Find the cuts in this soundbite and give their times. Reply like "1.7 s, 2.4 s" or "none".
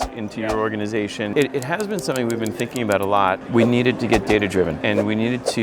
1.3 s, 3.4 s, 4.8 s